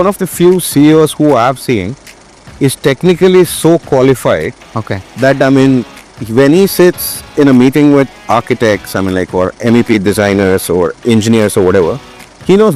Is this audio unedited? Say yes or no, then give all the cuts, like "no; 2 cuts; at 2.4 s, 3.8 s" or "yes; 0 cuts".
yes; 0 cuts